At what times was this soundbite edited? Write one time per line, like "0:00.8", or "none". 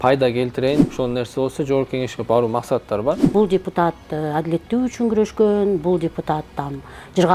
0:00.9
0:03.2